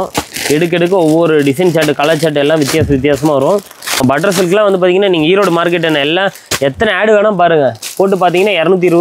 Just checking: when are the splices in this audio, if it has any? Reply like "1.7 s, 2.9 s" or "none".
4.0 s